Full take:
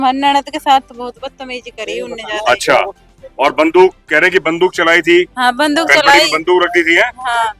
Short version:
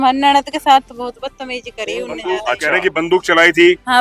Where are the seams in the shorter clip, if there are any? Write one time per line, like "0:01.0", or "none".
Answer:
0:02.5

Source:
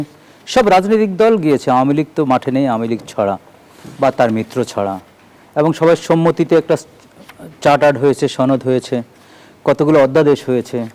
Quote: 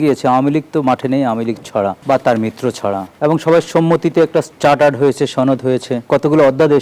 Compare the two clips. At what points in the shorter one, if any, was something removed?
0:02.0
0:03.1
0:04.5
0:06.0

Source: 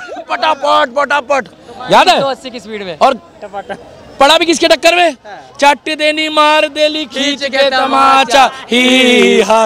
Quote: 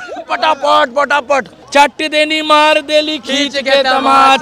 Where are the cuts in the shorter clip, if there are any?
0:01.6

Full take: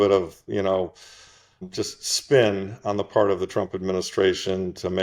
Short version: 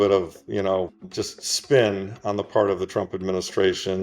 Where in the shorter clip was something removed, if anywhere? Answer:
0:01.0

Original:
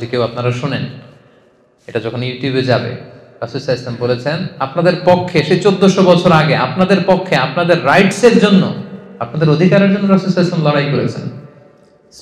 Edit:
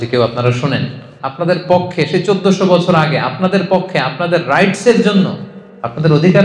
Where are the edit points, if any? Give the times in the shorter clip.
0:01.2

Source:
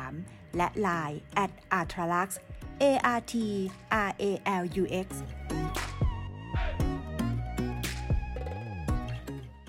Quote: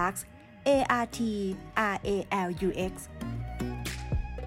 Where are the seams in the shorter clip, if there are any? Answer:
0:03.0

